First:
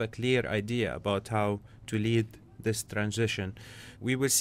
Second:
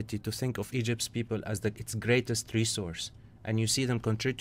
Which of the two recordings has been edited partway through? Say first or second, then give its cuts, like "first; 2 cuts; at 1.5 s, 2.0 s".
first; 1 cut; at 2.3 s